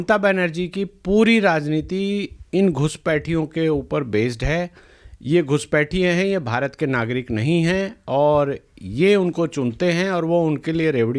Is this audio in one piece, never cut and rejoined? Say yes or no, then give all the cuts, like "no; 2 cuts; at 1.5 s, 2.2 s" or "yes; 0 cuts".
yes; 0 cuts